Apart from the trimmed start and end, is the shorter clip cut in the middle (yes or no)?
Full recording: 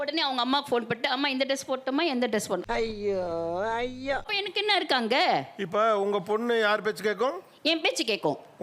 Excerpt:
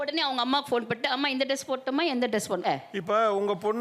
yes